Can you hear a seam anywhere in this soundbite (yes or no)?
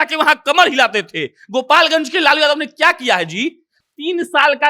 yes